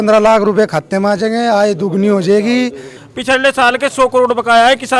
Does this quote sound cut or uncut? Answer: cut